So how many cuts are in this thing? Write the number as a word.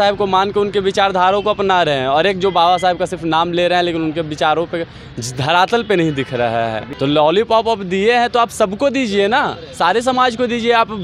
one